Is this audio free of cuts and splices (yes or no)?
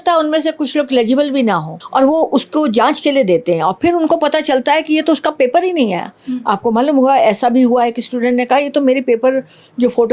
no